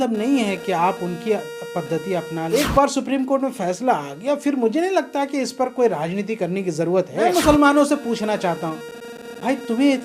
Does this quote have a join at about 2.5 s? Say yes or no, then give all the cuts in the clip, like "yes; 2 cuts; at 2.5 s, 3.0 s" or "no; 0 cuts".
yes; 2 cuts; at 2.5 s, 7.3 s